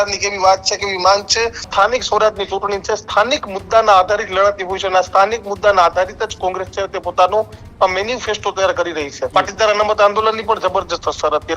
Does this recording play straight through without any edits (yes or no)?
no